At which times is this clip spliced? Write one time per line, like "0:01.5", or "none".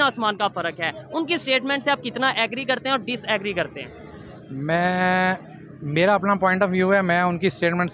none